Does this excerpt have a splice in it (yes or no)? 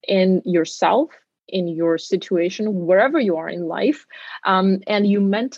no